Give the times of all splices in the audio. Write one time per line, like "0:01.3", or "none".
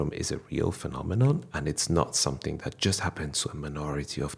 none